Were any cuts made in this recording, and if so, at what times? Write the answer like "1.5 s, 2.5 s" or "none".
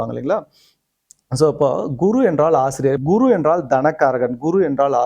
3.0 s